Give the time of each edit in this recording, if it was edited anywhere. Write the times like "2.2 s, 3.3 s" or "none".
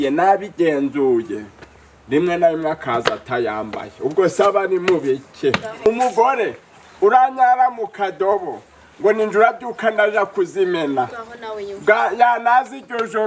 5.9 s